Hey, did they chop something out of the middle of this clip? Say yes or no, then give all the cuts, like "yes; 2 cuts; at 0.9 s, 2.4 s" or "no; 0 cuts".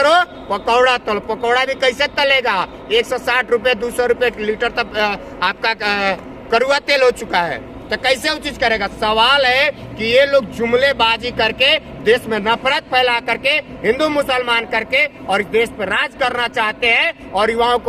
no; 0 cuts